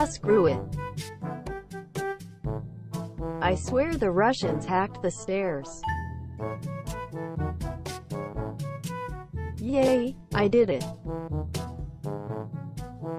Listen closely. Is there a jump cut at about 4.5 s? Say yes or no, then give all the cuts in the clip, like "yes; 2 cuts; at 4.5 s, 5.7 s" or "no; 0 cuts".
no; 0 cuts